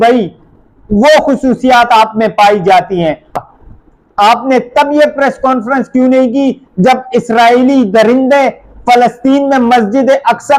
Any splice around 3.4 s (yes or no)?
yes